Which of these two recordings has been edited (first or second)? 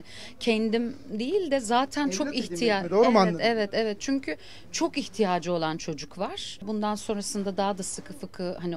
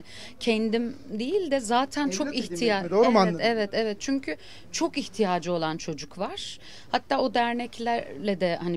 first